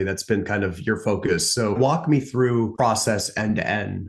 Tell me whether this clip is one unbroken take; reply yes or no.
no